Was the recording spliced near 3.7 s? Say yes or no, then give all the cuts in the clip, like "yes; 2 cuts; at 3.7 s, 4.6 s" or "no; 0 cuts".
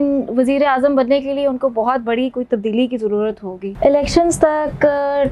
yes; 1 cut; at 3.7 s